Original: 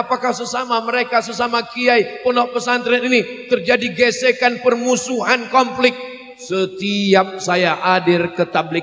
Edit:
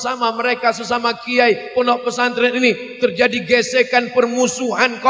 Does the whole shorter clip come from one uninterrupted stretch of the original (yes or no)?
yes